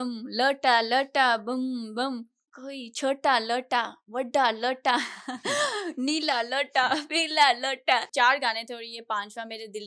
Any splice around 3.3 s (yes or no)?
no